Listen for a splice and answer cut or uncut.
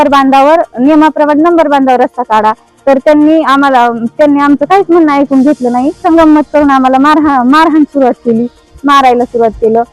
cut